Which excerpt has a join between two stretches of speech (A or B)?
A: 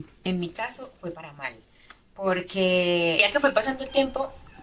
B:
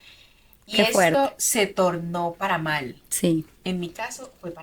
A